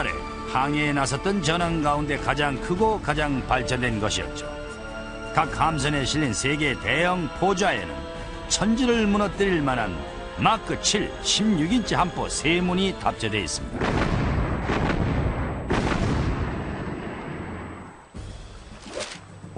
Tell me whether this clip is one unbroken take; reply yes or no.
no